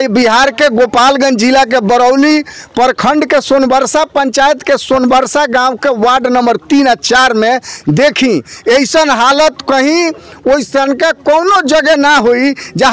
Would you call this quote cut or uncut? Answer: uncut